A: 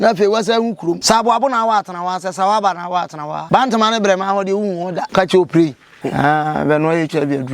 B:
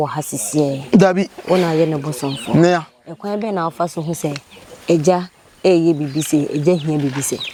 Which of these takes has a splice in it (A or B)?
A